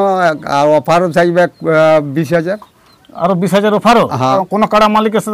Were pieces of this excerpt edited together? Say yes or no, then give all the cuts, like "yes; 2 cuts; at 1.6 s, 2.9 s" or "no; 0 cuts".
yes; 1 cut; at 4.4 s